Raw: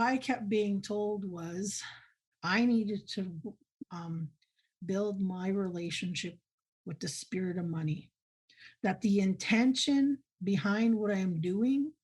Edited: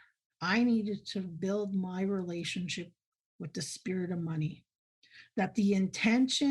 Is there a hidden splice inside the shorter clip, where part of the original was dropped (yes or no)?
yes